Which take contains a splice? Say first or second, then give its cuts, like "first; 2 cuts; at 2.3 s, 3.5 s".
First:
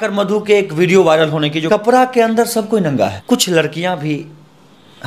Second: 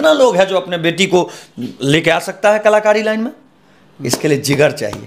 first; 2 cuts; at 1.6 s, 3.2 s